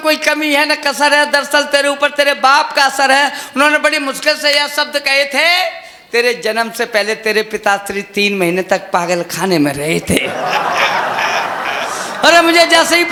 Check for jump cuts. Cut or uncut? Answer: uncut